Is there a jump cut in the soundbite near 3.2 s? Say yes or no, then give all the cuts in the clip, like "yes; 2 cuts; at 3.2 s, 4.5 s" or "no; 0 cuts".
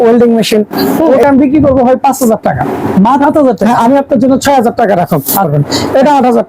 yes; 3 cuts; at 1.2 s, 3.2 s, 5.5 s